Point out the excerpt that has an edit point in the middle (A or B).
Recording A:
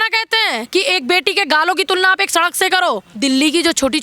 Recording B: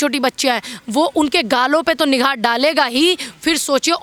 A